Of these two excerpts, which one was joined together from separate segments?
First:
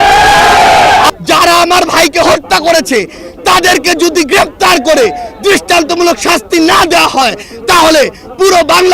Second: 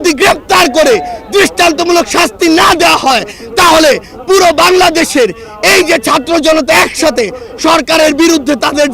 first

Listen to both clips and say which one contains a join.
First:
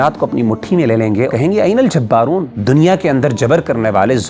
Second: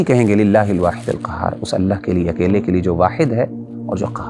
first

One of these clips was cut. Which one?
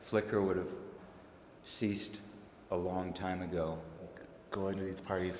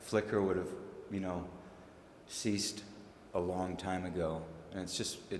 first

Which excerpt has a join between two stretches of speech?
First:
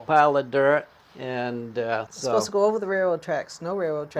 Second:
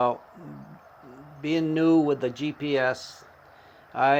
first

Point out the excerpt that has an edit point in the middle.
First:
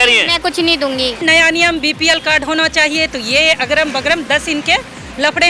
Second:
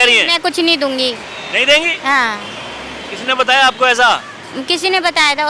first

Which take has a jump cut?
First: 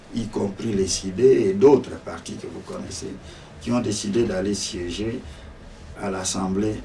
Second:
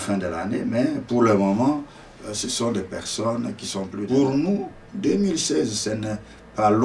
second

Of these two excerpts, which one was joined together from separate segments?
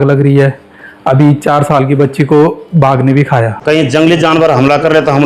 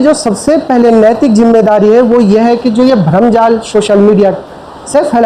first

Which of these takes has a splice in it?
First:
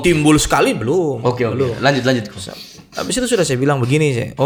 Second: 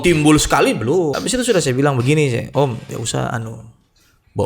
second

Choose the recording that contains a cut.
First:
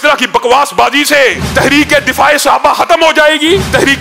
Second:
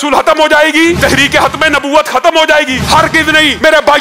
second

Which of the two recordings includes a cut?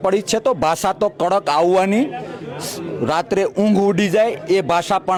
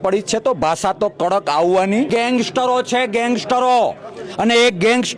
second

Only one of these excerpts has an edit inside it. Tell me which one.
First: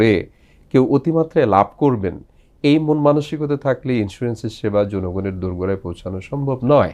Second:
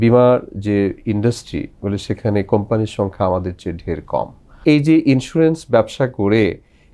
second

